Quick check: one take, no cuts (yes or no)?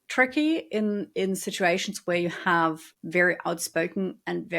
no